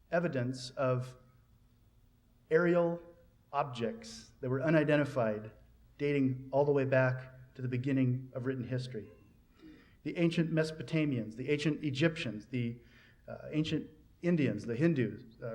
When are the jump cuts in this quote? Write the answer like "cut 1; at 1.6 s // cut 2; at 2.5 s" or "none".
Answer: cut 1; at 10.5 s